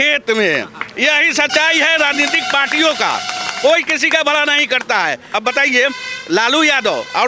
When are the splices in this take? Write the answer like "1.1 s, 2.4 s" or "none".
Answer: 5.3 s